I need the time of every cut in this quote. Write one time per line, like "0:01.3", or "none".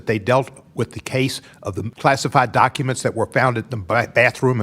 0:01.9